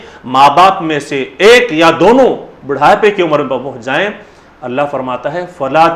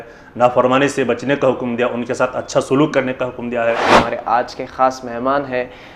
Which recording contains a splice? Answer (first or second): second